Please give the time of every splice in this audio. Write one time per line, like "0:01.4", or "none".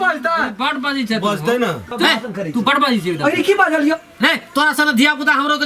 0:01.9